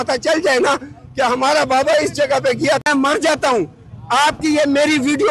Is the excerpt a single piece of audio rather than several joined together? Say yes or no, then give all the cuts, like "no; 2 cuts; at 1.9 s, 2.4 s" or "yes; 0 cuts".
yes; 0 cuts